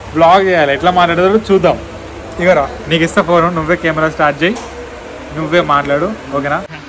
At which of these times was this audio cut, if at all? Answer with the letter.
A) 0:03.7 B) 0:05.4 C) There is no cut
C